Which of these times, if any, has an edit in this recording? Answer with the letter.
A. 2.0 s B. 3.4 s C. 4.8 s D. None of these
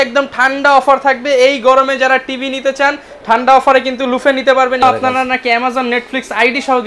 C